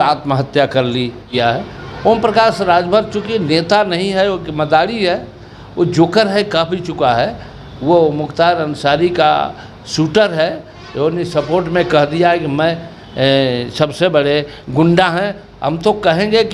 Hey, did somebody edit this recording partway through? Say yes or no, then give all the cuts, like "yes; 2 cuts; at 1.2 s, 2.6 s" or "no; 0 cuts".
yes; 1 cut; at 1.3 s